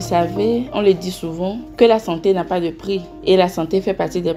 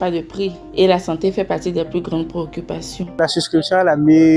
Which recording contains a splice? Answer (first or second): second